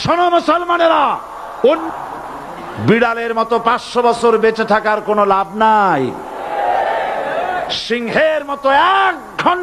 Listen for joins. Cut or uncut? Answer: cut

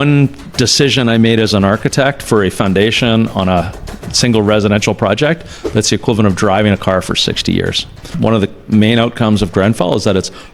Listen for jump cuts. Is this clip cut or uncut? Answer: cut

